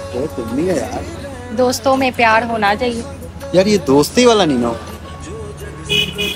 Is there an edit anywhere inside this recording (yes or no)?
yes